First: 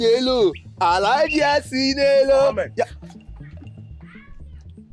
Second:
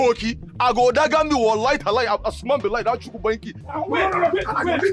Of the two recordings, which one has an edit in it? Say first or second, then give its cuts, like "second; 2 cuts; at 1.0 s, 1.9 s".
second; 1 cut; at 3.6 s